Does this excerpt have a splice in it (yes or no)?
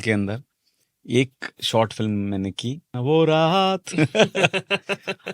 yes